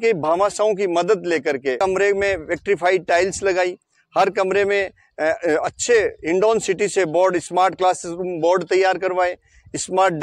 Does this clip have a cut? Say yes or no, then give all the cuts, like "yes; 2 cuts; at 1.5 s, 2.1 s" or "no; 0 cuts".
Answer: yes; 1 cut; at 1.8 s